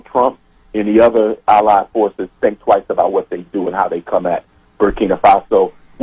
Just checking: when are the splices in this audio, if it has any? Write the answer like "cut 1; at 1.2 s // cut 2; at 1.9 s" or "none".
none